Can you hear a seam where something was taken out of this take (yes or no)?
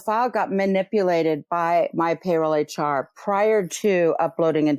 no